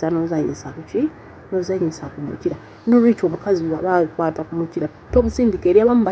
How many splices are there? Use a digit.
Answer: 1